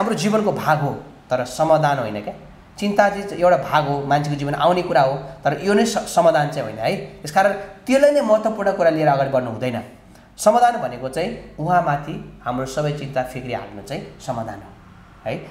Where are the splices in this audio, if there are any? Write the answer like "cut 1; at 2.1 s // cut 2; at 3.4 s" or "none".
none